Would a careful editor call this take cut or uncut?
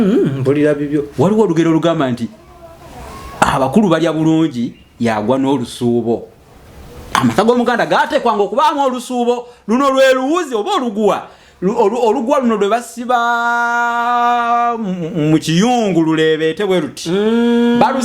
uncut